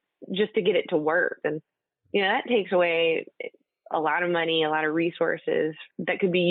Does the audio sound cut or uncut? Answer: cut